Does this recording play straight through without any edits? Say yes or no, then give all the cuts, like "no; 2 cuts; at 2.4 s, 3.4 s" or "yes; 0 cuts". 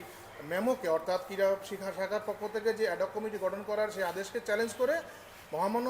yes; 0 cuts